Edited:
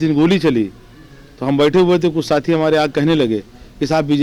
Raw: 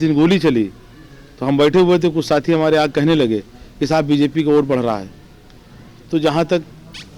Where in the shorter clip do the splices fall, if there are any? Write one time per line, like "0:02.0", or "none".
none